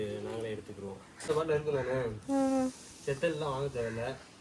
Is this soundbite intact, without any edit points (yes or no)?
no